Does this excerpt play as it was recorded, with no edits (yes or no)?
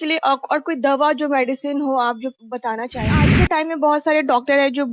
no